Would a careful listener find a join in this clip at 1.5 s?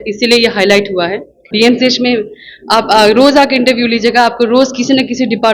yes; 1 cut; at 1.5 s

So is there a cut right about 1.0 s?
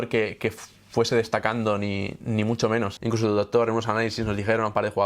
no; 1 cut; at 2.9 s

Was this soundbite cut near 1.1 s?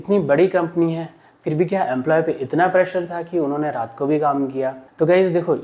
no; 0 cuts

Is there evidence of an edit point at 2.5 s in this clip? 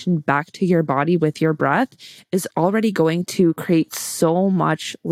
yes; 1 cut; at 2.5 s

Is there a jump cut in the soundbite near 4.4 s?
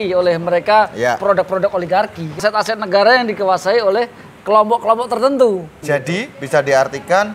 no; 2 cuts; at 2.4 s, 5.7 s

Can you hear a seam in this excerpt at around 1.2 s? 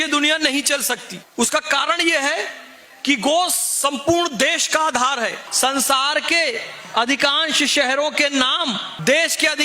yes; 2 cuts; at 1.2 s, 5.4 s

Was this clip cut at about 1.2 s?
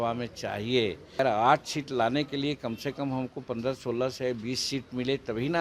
yes; 1 cut; at 1.2 s

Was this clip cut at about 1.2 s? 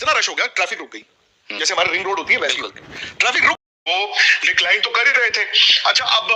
no; 1 cut; at 3.7 s

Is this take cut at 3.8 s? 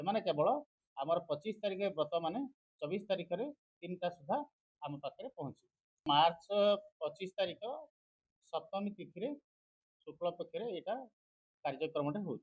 no; 1 cut; at 6.0 s

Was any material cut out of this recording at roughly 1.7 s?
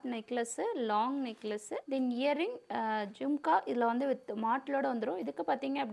yes; 1 cut; at 1.7 s

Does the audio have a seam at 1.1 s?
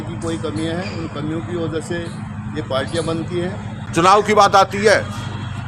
no; 1 cut; at 3.7 s

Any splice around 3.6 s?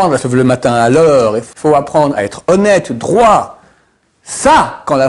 no; 1 cut; at 1.5 s

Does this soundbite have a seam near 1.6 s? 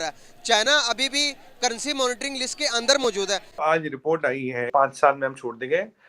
no; 2 cuts; at 3.6 s, 4.7 s

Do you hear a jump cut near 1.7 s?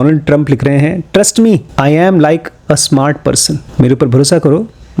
yes; 2 cuts; at 1.7 s, 3.6 s

